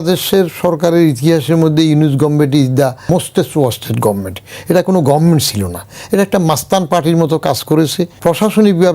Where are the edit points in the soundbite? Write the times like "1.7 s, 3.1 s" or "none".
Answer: 3.1 s, 8.1 s

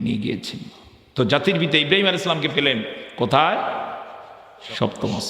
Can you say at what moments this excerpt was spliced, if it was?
none

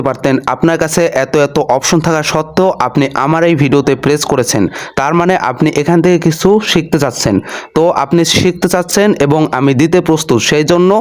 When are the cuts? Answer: none

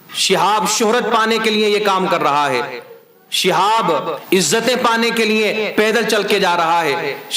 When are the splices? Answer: 4.2 s

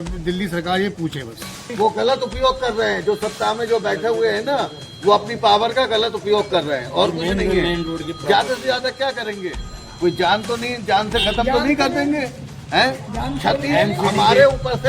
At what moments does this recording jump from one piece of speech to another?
1.7 s

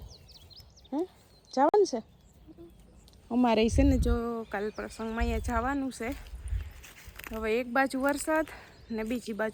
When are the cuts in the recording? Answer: none

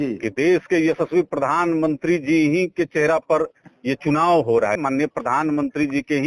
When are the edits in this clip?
4.8 s

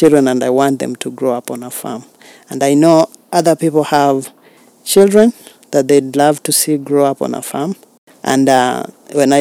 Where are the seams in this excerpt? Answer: none

